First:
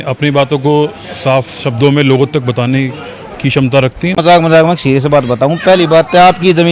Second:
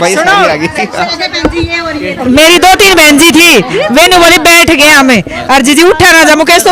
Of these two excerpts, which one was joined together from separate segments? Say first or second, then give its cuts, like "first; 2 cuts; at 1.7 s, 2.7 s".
first; 1 cut; at 4.1 s